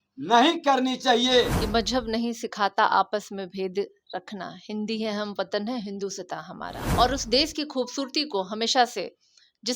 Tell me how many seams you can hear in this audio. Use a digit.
2